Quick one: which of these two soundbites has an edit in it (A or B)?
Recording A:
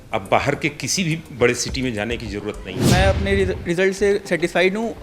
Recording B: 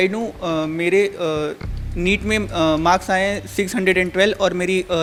A